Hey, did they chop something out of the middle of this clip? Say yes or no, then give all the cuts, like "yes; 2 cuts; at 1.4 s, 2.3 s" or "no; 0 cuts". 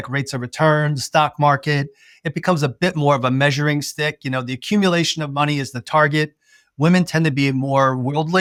no; 0 cuts